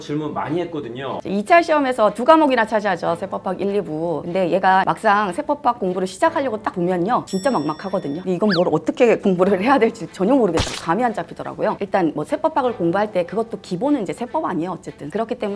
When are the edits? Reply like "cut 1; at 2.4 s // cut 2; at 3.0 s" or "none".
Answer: cut 1; at 1.2 s